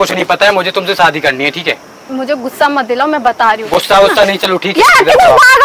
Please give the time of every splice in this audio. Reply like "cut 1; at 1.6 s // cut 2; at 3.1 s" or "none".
cut 1; at 1.9 s